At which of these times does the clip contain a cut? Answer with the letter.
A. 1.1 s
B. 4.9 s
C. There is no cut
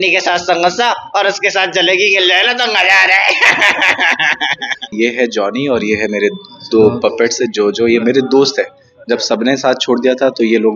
B